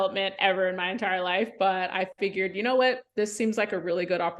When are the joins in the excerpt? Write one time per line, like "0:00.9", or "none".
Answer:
none